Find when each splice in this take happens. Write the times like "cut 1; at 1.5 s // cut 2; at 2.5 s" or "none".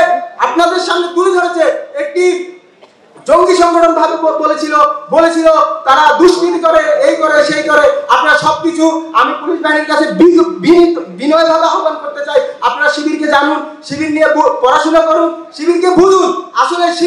none